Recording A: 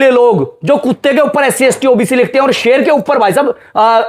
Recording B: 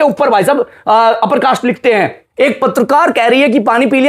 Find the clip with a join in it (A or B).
B